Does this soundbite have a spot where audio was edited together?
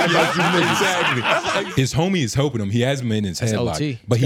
yes; 1 cut; at 1.7 s

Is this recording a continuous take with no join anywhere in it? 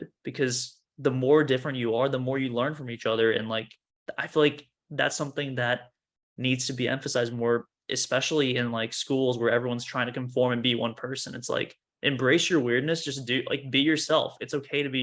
yes; 0 cuts

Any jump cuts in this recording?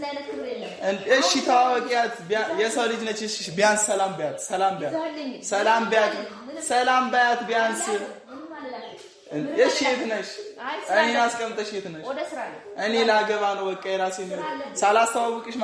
no; 0 cuts

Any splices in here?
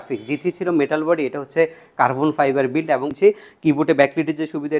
yes; 1 cut; at 3.2 s

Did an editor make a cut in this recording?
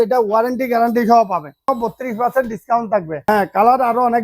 yes; 2 cuts; at 1.7 s, 3.2 s

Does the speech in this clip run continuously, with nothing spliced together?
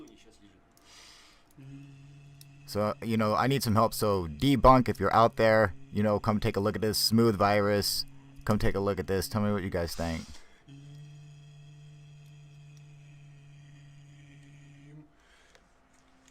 no; 1 cut; at 12.0 s

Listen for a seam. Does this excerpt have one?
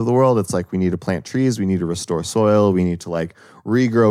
no; 0 cuts

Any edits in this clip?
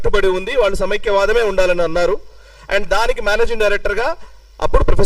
no; 0 cuts

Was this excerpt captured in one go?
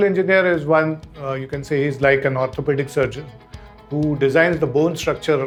yes; 0 cuts

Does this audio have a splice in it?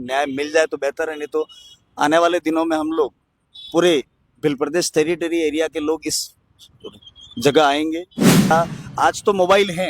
yes; 1 cut; at 8.5 s

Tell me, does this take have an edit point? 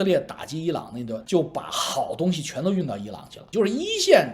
yes; 2 cuts; at 1.2 s, 3.4 s

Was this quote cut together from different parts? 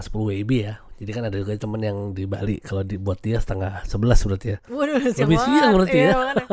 no; 0 cuts

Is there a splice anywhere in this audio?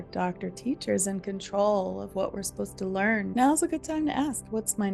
yes; 1 cut; at 3.3 s

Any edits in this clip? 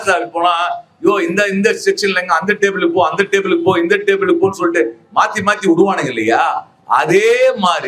no; 0 cuts

